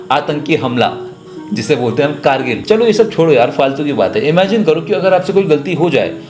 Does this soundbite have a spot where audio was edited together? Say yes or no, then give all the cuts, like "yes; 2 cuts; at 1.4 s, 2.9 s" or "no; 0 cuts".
yes; 1 cut; at 2.6 s